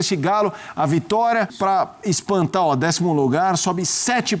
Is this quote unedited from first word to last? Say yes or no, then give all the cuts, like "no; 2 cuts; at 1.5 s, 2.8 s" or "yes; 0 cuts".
no; 1 cut; at 1.5 s